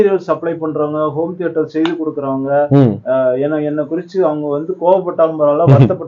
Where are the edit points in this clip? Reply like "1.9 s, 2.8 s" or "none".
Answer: none